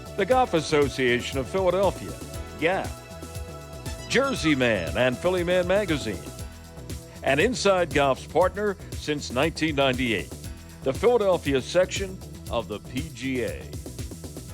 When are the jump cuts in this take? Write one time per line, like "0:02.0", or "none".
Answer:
0:13.6